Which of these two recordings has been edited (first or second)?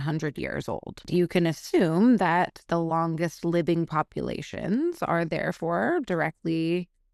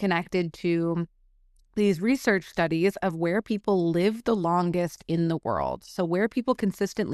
first